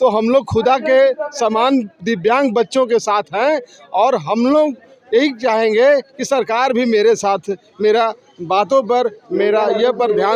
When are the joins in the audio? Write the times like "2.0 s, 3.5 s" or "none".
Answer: none